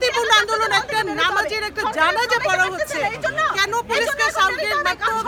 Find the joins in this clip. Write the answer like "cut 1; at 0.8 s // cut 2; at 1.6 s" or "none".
none

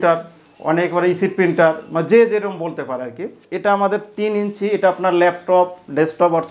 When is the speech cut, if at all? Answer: cut 1; at 3.4 s

